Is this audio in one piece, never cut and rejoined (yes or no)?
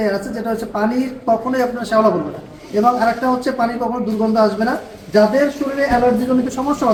yes